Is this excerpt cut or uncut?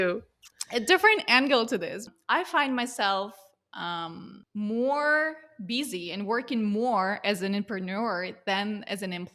cut